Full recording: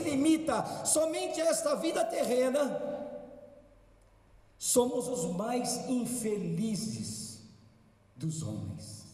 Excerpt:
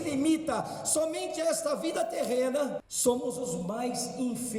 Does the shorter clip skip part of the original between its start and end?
yes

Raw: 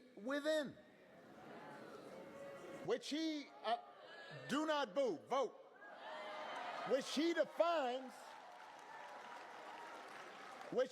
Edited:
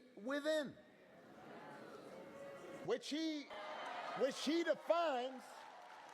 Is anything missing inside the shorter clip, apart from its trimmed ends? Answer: yes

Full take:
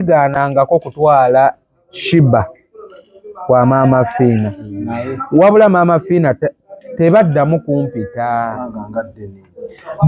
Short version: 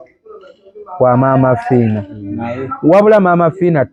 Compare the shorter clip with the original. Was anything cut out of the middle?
no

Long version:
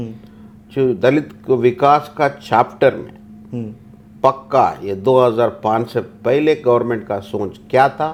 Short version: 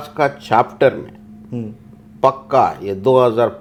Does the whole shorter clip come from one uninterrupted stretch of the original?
yes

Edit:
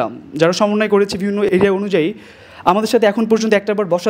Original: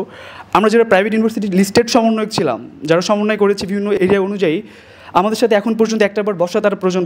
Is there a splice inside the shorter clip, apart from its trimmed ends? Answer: no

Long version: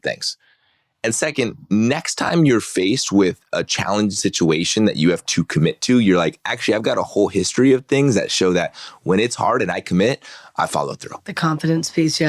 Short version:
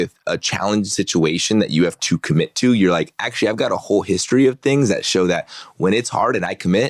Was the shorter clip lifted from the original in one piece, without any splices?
yes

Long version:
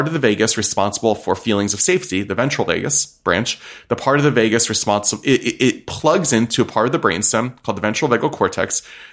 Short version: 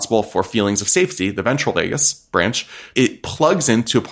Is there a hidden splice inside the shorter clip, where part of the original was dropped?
yes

